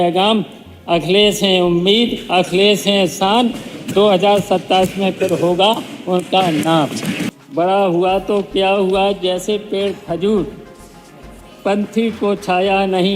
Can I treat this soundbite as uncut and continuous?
no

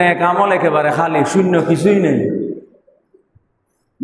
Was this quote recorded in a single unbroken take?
yes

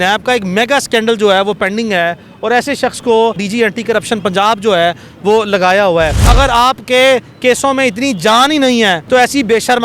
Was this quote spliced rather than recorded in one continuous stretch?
yes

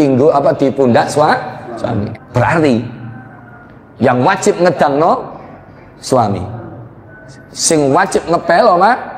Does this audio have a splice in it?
yes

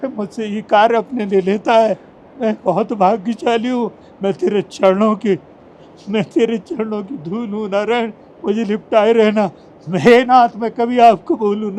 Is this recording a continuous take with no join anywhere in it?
yes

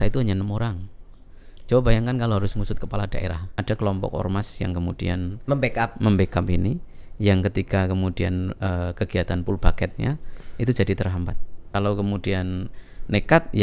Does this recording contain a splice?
yes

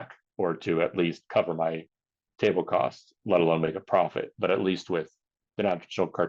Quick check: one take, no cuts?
yes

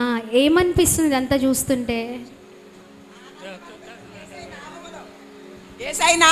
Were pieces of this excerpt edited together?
no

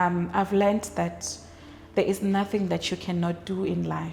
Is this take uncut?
yes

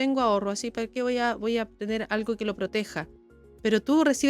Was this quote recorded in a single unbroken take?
yes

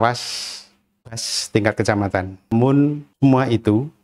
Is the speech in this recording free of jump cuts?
no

